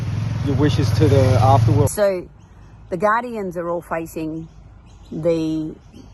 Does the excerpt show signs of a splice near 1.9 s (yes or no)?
yes